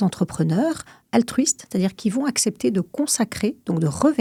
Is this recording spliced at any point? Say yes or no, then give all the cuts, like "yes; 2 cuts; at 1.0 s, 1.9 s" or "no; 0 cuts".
no; 0 cuts